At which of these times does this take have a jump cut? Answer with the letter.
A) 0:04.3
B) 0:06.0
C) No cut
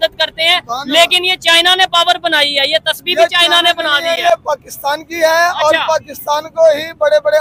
C